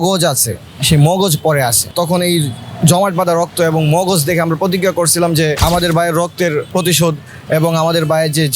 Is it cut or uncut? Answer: cut